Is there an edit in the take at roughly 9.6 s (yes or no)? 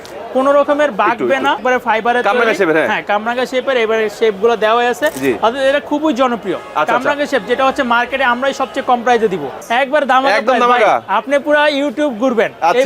yes